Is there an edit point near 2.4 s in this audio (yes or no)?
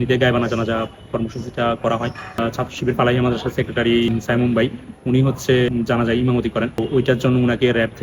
yes